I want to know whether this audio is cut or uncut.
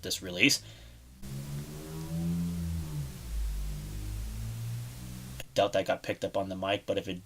uncut